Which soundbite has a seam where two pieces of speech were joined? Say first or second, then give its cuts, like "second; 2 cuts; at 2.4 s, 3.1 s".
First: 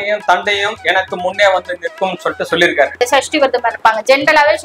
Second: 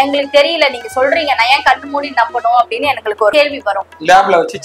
first; 1 cut; at 3.0 s